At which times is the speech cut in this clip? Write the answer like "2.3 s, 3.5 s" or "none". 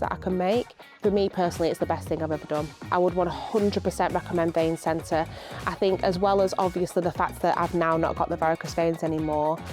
0.9 s